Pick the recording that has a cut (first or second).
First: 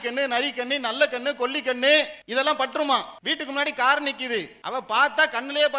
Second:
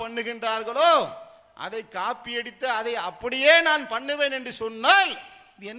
first